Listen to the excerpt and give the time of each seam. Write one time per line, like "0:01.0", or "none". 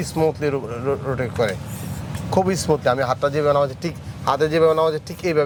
none